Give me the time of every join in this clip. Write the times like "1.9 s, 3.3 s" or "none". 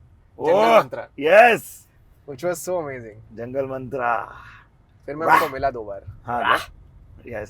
none